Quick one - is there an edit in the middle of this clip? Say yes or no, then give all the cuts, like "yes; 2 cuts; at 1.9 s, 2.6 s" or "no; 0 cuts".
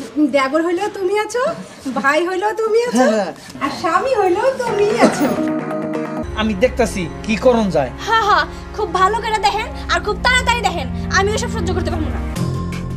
yes; 1 cut; at 6.2 s